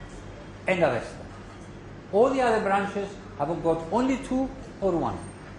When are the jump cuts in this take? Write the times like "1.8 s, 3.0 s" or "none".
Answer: 3.1 s